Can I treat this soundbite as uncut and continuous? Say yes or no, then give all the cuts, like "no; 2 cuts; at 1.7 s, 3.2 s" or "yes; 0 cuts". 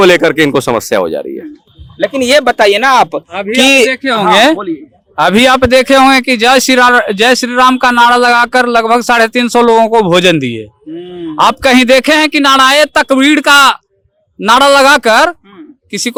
yes; 0 cuts